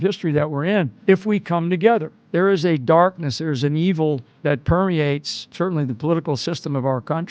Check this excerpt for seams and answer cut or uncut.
cut